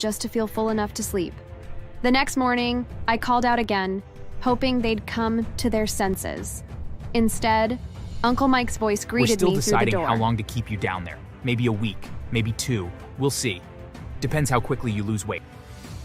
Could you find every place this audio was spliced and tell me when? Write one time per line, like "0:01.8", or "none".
0:10.1